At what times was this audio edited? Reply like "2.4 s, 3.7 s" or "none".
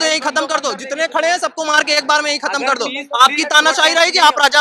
none